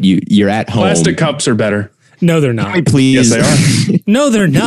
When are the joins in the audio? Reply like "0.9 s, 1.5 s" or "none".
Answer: 2.0 s

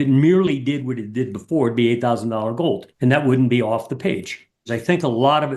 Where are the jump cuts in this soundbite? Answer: 2.9 s, 4.8 s

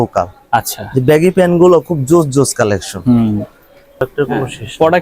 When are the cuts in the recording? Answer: 3.9 s

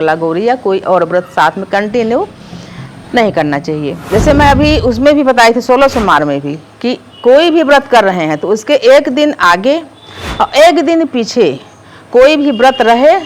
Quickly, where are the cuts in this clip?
4.0 s

